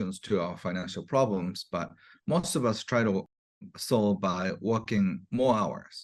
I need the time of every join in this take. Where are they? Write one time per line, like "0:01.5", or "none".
none